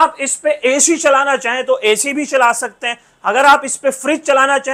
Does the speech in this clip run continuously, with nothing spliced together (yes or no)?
yes